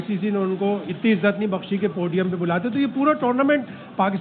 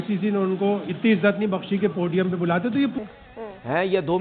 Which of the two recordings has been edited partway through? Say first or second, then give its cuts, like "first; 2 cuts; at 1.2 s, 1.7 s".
second; 1 cut; at 3.0 s